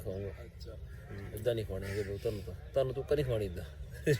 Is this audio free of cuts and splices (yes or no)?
yes